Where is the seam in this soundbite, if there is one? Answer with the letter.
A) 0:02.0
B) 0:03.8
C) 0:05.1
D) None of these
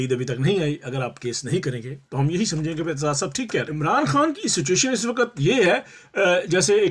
B